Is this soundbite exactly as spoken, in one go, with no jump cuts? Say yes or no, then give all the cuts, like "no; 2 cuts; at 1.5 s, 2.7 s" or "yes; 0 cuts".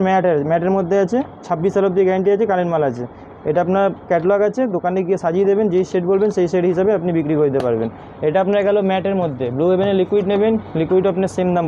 yes; 0 cuts